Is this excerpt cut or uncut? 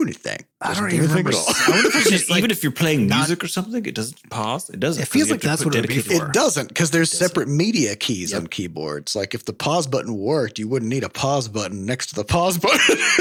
uncut